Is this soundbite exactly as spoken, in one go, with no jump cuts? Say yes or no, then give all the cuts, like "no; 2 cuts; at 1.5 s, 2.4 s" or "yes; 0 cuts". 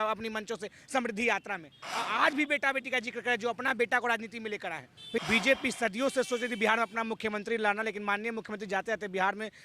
no; 1 cut; at 5.2 s